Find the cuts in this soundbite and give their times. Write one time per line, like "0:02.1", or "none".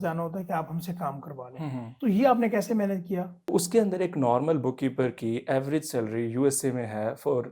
0:01.9
0:03.5